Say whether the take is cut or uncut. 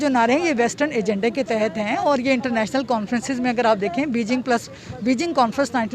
uncut